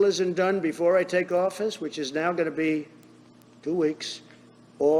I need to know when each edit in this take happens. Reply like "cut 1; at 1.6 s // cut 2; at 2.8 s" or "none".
none